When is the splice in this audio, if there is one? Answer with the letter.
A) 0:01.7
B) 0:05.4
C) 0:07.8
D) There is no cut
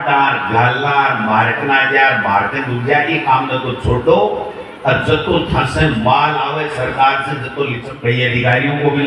C